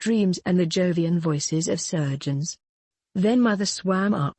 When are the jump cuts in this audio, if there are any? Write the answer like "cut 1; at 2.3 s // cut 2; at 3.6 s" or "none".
cut 1; at 2.5 s

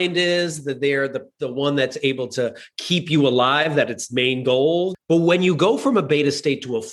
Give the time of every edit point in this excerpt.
cut 1; at 4.9 s

